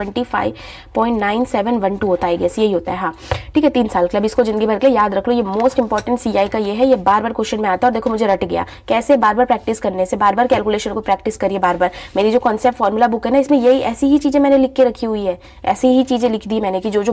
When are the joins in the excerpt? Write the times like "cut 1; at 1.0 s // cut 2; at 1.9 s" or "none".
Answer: none